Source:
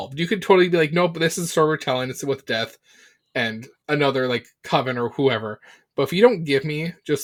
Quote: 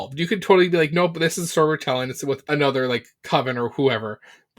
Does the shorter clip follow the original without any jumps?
no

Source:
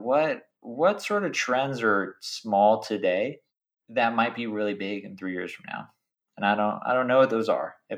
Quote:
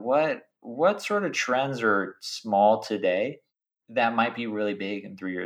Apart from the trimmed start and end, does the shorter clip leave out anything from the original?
no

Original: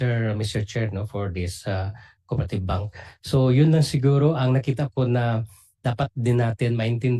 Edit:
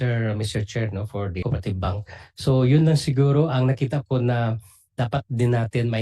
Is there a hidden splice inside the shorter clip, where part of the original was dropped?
yes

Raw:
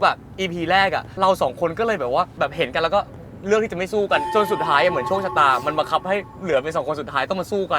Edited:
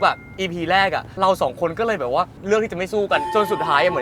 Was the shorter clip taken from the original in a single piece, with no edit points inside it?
no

